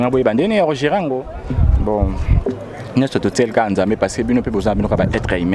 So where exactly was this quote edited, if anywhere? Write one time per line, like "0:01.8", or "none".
none